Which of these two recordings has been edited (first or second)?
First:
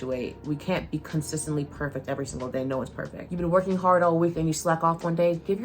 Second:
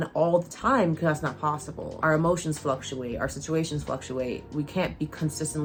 first